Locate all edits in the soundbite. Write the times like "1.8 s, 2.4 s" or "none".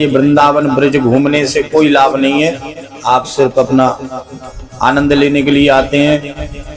none